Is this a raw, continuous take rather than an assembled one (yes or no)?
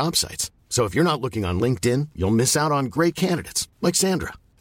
yes